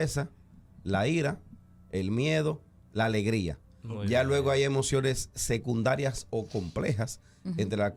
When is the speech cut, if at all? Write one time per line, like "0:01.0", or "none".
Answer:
none